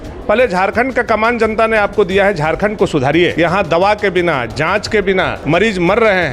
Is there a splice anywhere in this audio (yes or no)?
yes